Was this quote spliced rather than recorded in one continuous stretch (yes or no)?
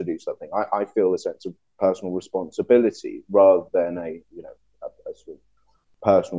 no